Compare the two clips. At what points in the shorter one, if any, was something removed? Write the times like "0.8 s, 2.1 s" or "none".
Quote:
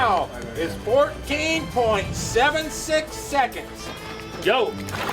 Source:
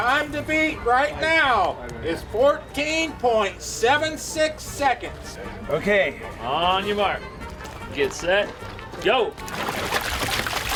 4.0 s